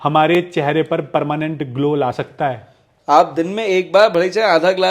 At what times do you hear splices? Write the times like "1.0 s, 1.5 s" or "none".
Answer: 2.9 s